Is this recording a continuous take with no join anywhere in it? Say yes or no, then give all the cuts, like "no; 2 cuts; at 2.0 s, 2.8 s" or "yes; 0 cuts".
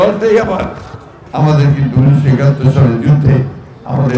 yes; 0 cuts